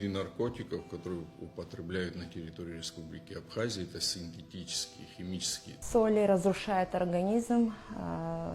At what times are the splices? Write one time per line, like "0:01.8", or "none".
0:05.7